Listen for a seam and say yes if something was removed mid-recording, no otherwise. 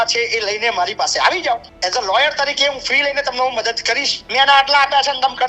yes